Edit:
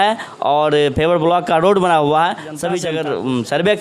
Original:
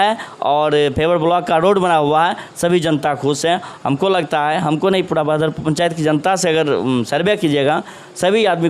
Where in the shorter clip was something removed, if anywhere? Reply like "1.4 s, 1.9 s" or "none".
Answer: 2.8 s

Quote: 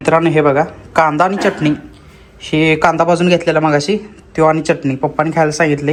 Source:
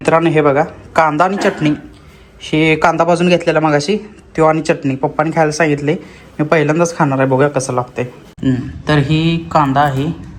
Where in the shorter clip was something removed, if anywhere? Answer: none

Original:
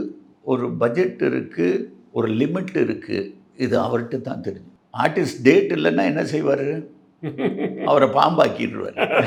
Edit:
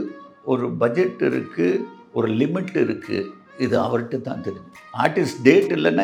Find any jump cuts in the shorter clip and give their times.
none

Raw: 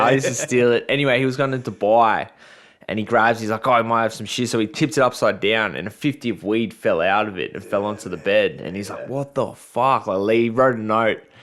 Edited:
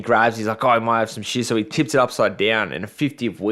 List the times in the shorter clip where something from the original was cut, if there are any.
none

